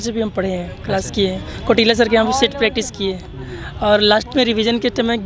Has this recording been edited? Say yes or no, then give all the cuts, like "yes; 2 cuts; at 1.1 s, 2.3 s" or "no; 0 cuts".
no; 0 cuts